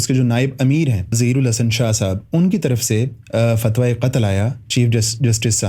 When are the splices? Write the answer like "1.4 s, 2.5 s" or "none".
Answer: 1.2 s